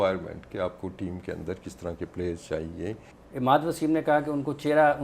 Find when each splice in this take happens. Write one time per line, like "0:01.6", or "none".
0:03.1